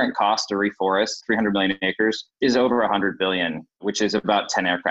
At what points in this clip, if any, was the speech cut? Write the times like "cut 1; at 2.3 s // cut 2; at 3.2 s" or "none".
cut 1; at 1.2 s // cut 2; at 2.3 s // cut 3; at 3.7 s